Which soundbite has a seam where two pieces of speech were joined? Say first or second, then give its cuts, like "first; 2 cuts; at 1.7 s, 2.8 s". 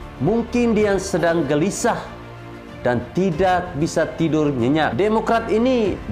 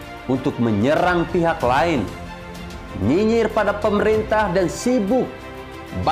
first; 1 cut; at 4.9 s